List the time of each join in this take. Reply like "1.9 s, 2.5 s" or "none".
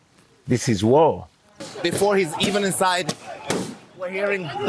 1.7 s